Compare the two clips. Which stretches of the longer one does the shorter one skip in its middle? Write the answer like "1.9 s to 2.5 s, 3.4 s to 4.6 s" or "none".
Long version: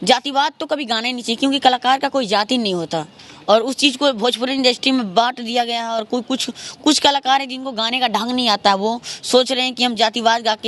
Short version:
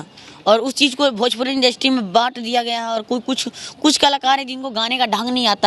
none